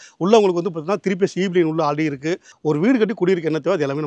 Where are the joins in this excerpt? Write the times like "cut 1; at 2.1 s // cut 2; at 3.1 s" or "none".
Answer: cut 1; at 2.5 s